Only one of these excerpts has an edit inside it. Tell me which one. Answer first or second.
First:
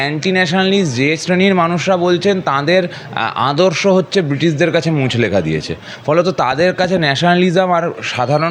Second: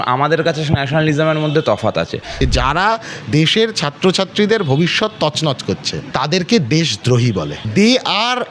second